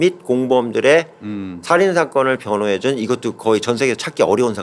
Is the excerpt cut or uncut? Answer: uncut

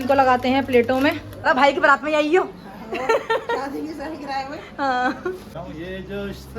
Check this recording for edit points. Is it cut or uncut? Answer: cut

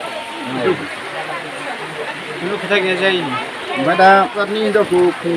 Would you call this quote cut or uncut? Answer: cut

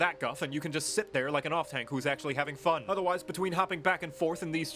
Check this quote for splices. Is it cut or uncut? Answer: uncut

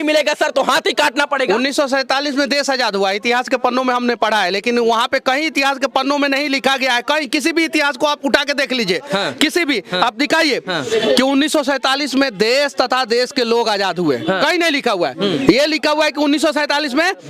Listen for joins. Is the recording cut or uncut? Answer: uncut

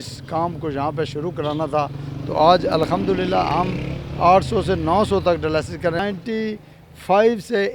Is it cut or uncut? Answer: cut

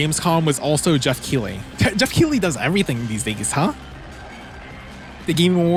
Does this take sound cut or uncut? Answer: uncut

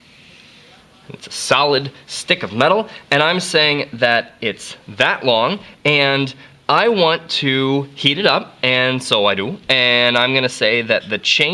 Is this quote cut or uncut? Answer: cut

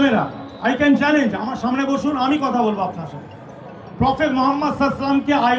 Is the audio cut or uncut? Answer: uncut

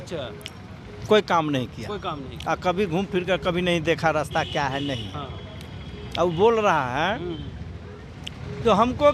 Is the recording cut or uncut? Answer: uncut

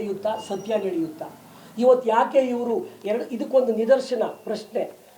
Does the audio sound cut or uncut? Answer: uncut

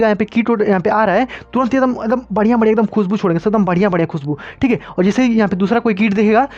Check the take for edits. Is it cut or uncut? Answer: uncut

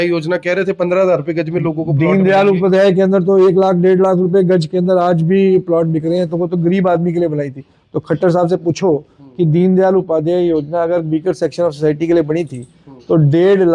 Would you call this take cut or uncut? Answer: uncut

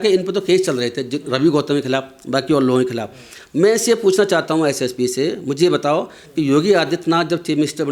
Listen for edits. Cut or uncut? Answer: uncut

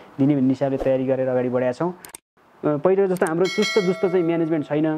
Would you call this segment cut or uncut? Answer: cut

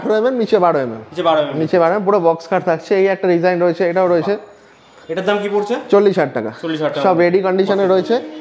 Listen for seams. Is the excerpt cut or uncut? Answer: uncut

